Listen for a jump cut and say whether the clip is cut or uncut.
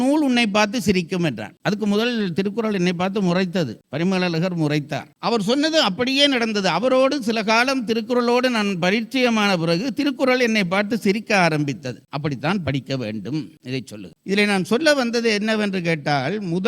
uncut